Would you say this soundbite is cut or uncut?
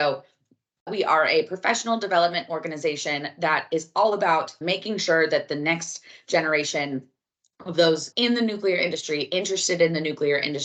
uncut